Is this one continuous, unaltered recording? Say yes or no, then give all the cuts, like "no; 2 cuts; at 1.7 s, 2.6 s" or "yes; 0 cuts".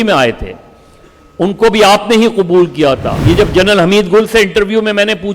no; 1 cut; at 3.1 s